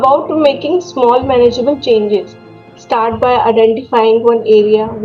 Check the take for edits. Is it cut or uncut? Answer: uncut